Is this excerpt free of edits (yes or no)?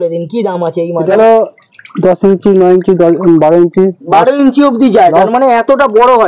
no